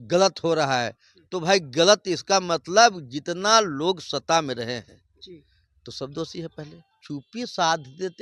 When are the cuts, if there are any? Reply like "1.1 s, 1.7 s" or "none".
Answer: 6.9 s